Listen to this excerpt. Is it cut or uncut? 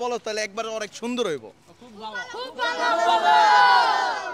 uncut